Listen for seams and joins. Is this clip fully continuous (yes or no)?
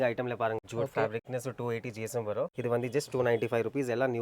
no